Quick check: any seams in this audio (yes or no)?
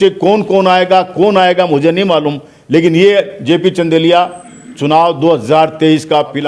no